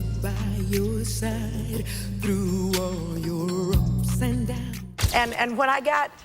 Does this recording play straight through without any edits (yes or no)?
no